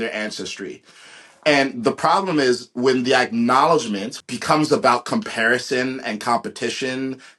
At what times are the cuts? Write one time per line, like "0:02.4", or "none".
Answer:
0:04.1